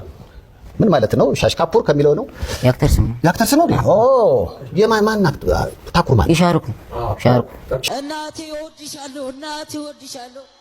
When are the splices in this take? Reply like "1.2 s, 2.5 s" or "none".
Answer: 7.8 s

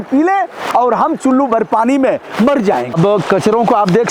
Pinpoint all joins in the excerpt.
3.0 s

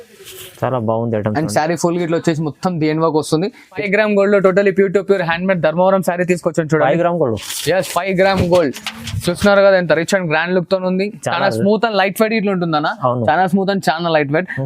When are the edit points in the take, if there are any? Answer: 3.7 s

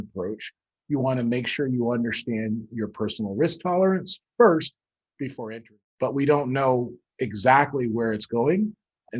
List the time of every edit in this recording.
5.5 s

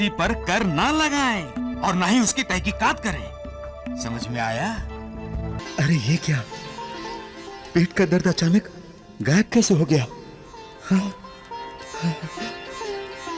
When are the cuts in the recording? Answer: 5.6 s

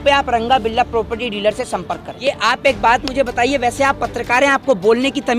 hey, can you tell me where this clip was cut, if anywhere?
2.1 s

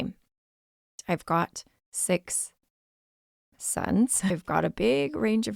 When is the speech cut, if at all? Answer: 1.0 s, 4.4 s

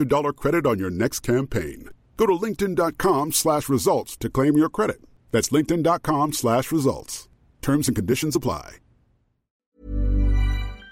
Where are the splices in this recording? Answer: 9.7 s

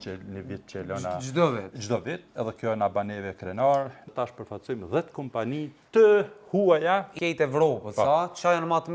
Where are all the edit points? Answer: 4.1 s, 7.1 s

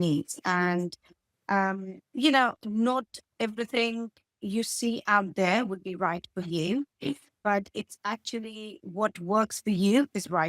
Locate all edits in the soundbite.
none

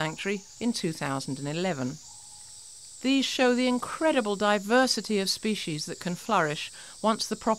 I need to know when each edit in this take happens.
3.5 s

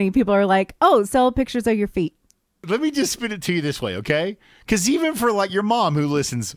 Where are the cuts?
2.6 s

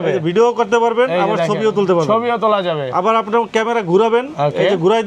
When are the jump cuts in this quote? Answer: none

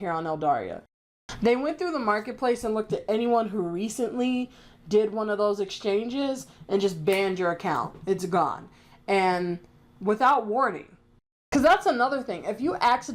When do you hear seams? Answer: 1.0 s, 11.3 s

